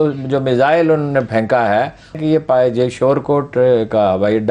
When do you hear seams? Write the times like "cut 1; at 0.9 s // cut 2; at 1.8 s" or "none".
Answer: cut 1; at 2.2 s